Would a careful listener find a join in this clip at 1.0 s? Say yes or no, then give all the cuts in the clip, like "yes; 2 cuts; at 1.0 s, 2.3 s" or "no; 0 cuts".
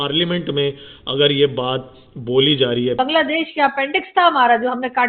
no; 1 cut; at 3.0 s